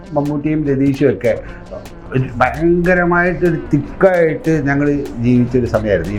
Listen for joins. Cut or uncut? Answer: uncut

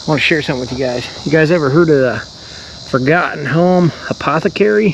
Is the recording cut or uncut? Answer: uncut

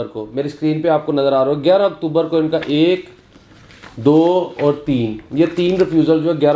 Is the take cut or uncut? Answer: uncut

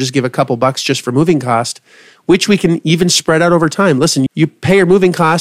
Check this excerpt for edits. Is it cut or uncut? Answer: cut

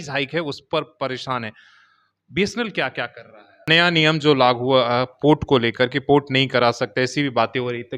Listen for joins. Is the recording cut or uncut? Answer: cut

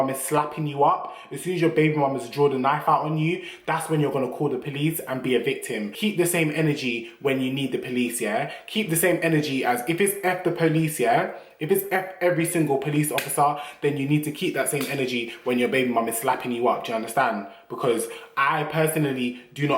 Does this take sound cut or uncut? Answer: uncut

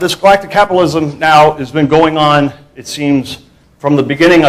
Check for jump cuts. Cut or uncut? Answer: uncut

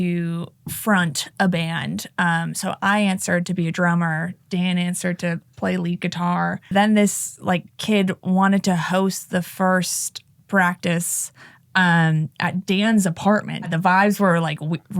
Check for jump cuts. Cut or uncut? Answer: cut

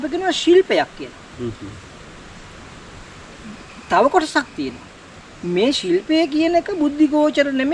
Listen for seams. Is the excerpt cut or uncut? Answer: uncut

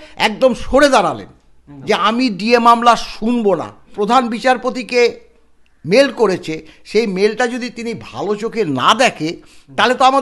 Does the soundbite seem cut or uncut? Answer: cut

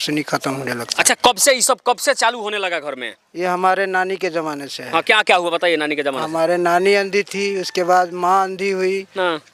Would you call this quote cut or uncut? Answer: uncut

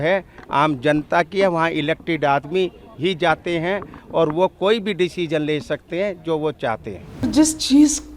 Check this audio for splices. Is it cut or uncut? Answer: cut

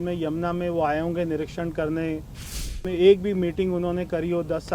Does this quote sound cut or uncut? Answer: cut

